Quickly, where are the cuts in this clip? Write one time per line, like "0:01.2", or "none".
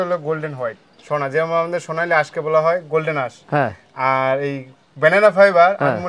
none